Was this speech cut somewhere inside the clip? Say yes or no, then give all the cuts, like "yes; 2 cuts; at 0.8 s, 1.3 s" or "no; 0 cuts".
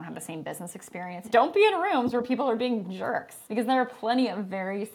yes; 2 cuts; at 1.2 s, 3.3 s